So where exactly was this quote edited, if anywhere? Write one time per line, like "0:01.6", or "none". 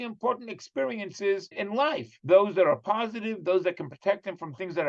0:01.5